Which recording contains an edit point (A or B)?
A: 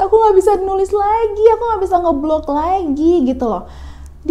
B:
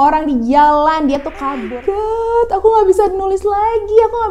B